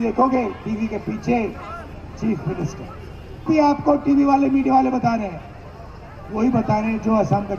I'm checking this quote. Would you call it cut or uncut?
cut